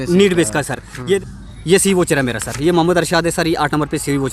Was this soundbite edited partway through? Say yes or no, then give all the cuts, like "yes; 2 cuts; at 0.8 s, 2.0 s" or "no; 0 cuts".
yes; 1 cut; at 1.2 s